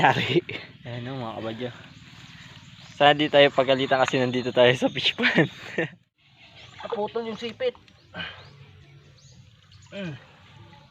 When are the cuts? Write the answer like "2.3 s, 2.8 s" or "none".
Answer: 6.0 s